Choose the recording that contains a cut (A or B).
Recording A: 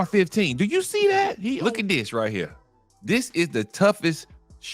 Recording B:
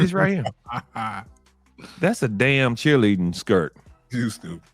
A